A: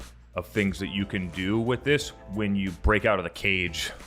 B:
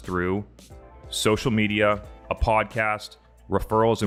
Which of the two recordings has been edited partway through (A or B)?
A